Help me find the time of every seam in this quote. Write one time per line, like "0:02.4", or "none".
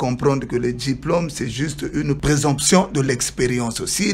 0:02.2